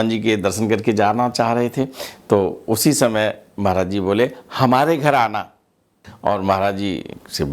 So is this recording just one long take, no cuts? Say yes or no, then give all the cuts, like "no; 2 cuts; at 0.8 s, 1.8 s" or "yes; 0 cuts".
no; 1 cut; at 6.0 s